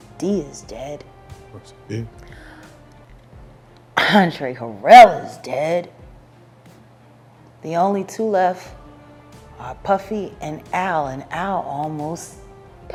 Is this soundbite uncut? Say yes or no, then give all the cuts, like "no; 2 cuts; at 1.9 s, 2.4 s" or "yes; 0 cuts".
yes; 0 cuts